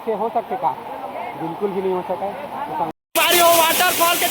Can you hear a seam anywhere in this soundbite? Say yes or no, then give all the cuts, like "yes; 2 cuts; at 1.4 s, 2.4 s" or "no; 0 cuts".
yes; 1 cut; at 2.9 s